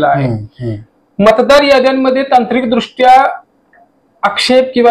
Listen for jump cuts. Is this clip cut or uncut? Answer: uncut